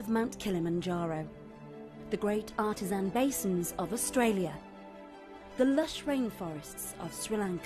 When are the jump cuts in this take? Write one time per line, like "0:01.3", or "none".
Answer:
none